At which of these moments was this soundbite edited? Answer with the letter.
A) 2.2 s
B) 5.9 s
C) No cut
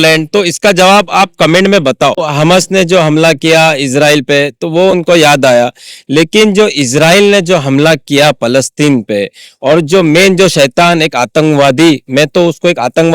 A